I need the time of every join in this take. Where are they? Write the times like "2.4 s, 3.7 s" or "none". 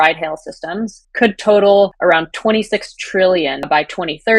2.0 s, 3.7 s